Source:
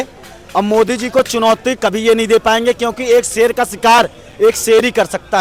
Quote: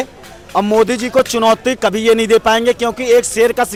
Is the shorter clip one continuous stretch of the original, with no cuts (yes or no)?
yes